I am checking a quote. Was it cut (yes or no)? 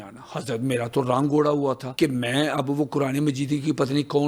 no